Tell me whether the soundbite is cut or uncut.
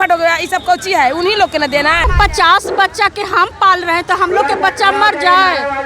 cut